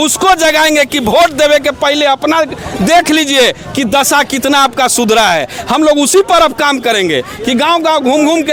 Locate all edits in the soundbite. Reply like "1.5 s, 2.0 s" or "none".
none